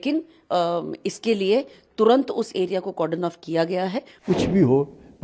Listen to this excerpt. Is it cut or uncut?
cut